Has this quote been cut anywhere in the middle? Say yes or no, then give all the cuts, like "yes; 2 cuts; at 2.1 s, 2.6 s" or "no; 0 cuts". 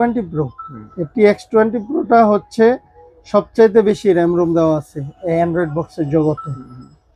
no; 0 cuts